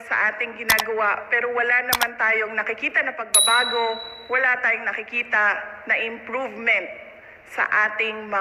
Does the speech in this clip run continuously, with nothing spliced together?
yes; 0 cuts

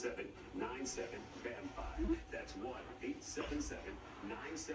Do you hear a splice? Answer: no; 0 cuts

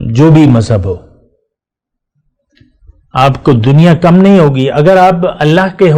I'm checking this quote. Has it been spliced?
no; 0 cuts

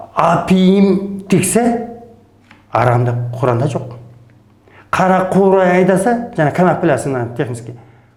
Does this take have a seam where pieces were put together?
no; 0 cuts

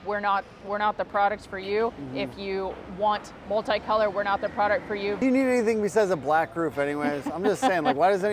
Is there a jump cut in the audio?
yes; 1 cut; at 5.2 s

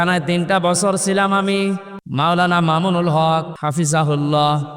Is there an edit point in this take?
yes; 2 cuts; at 2.0 s, 3.5 s

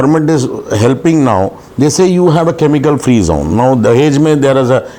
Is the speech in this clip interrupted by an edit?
no; 0 cuts

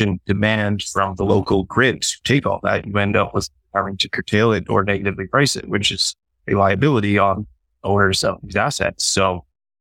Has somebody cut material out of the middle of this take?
no; 0 cuts

